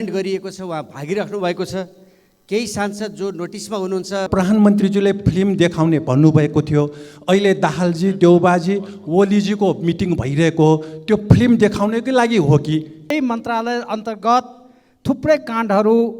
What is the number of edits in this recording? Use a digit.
2